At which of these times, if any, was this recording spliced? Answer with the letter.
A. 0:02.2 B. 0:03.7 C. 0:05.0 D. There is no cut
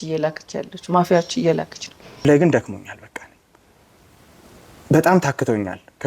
A